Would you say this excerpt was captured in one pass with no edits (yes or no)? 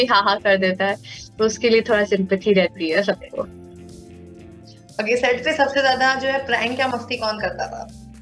yes